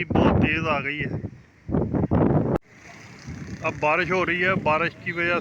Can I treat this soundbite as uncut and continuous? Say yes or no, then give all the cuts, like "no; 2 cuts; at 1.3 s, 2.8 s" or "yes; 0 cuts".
no; 1 cut; at 2.6 s